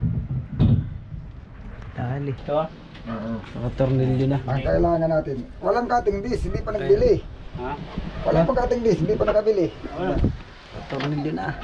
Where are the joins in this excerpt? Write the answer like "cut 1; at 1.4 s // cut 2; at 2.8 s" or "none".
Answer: cut 1; at 2.4 s